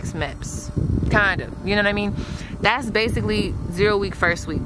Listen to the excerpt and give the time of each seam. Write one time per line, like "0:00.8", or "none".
none

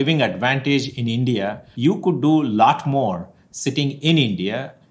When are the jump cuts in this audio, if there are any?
0:01.6

